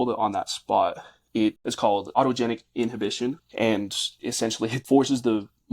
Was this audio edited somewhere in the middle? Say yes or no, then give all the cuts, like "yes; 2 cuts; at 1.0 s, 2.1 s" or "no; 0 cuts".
yes; 3 cuts; at 2.1 s, 3.4 s, 4.6 s